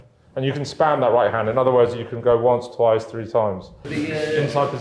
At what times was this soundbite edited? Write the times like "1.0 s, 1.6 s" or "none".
3.8 s